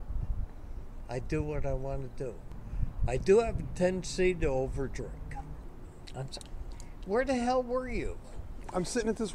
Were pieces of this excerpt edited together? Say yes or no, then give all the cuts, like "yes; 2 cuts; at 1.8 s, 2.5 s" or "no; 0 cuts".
yes; 2 cuts; at 2.5 s, 5.6 s